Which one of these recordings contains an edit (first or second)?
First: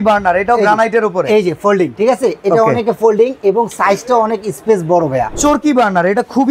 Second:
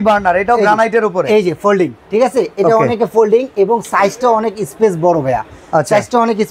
first